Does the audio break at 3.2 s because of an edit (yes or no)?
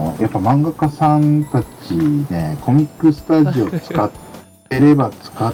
no